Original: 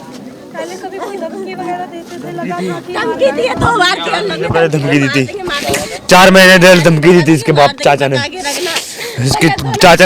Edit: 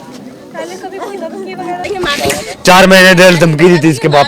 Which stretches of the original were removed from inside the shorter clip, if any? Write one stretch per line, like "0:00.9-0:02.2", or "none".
0:01.9-0:05.3